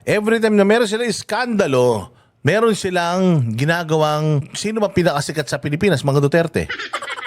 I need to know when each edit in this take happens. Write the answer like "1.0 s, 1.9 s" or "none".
4.5 s